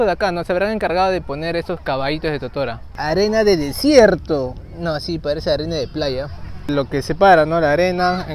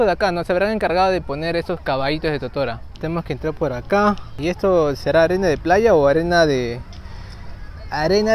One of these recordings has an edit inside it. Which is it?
first; 2 cuts; at 2.8 s, 6.7 s

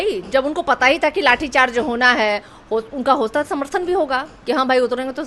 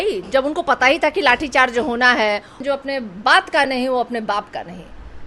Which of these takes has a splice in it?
second; 1 cut; at 2.6 s

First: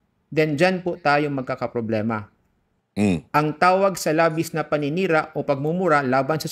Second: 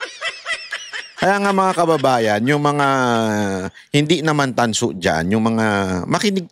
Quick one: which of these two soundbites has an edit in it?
second; 1 cut; at 1.0 s

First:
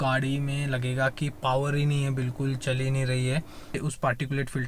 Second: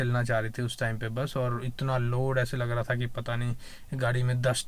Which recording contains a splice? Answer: first; 1 cut; at 3.8 s

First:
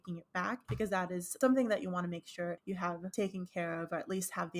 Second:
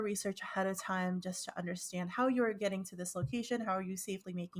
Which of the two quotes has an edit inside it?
first; 2 cuts; at 1.1 s, 3.0 s

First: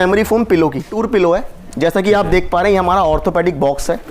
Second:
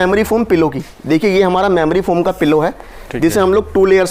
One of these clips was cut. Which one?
first; 1 cut; at 1.0 s

